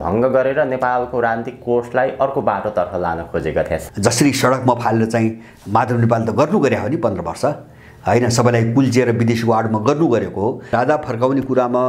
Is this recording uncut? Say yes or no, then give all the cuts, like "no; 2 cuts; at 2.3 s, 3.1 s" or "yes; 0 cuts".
no; 2 cuts; at 3.8 s, 10.7 s